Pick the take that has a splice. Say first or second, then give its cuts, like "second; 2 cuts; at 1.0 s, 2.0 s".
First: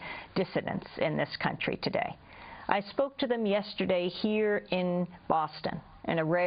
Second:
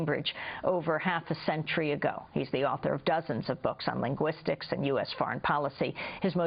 second; 1 cut; at 3.8 s